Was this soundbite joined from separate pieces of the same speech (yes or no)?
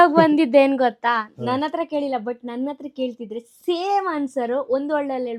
no